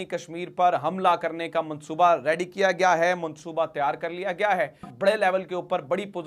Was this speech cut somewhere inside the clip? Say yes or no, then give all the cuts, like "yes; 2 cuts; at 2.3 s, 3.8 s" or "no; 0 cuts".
yes; 1 cut; at 4.9 s